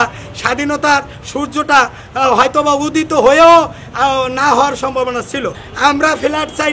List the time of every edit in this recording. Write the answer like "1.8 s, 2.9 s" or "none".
5.6 s